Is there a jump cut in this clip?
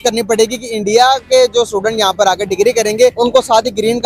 yes; 1 cut; at 3.1 s

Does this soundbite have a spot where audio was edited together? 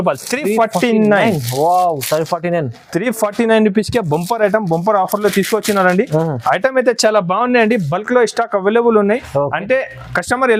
no; 0 cuts

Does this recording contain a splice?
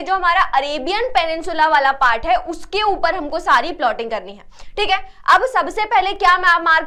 no; 0 cuts

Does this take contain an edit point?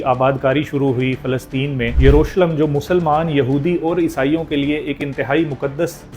yes; 1 cut; at 1.9 s

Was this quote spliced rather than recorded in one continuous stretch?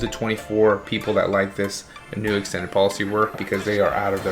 yes; 1 cut; at 3.4 s

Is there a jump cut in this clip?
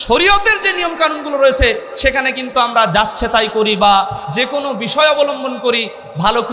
no; 0 cuts

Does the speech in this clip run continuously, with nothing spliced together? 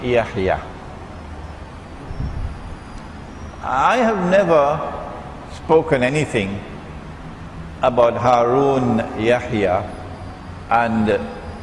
no; 1 cut; at 9.6 s

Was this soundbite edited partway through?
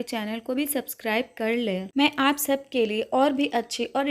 yes; 1 cut; at 1.9 s

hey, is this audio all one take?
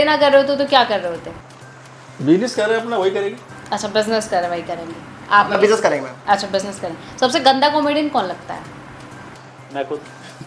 yes; 0 cuts

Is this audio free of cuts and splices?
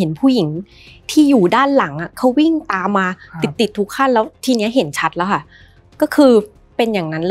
yes; 0 cuts

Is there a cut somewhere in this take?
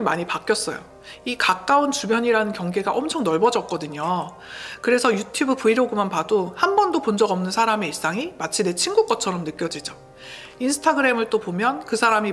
no; 0 cuts

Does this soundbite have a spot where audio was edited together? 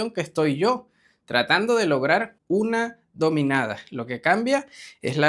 yes; 1 cut; at 2.3 s

